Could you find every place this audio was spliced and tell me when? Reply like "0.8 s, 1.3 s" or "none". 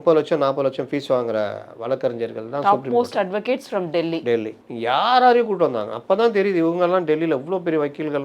4.6 s

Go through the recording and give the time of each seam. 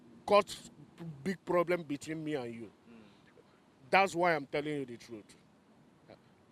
none

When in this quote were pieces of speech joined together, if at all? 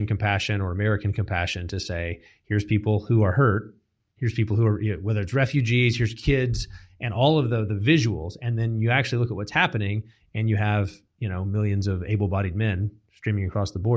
none

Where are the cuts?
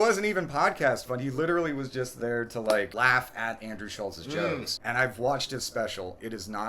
2.9 s, 4.7 s

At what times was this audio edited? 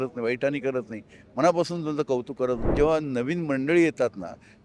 2.7 s

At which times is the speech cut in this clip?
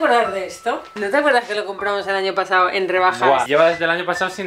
0.9 s, 3.5 s

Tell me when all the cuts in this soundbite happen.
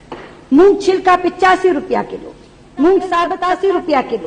3.4 s

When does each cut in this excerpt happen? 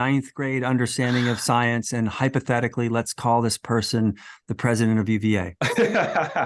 5.5 s

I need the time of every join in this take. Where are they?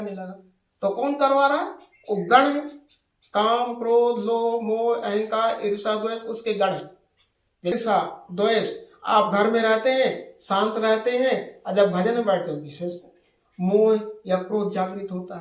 7.7 s

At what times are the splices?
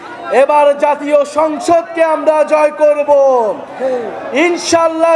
none

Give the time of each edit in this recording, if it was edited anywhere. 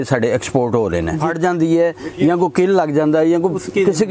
1.3 s

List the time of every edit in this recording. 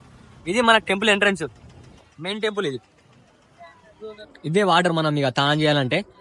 4.2 s

